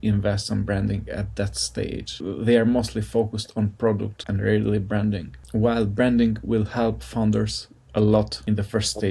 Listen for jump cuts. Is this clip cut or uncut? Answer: uncut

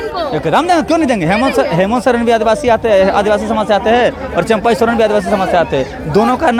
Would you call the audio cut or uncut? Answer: uncut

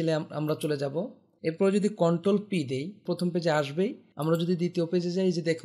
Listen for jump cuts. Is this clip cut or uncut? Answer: cut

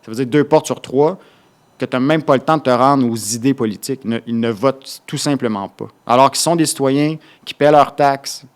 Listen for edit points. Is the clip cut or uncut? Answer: uncut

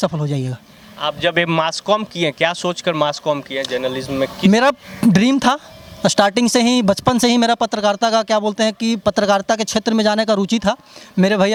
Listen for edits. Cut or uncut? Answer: uncut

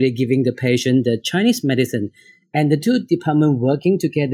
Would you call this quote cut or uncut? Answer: uncut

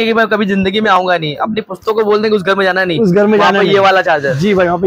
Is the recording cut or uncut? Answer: uncut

